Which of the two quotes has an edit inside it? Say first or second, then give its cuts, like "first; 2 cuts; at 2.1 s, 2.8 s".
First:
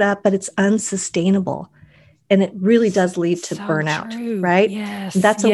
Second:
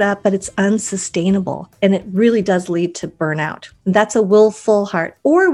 second; 2 cuts; at 1.6 s, 3.6 s